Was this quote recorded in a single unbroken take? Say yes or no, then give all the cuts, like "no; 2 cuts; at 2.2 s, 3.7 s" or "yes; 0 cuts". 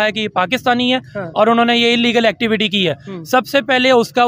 yes; 0 cuts